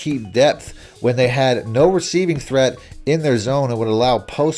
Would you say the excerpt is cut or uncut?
uncut